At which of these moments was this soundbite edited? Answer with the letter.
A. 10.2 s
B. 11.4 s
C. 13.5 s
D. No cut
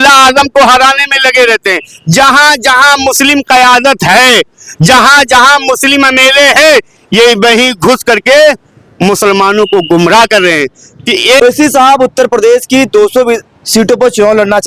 B